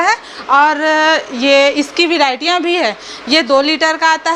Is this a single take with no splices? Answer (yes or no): yes